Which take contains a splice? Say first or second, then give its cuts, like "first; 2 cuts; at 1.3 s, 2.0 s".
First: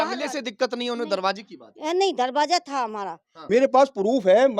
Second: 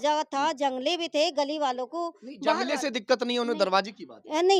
first; 1 cut; at 3.3 s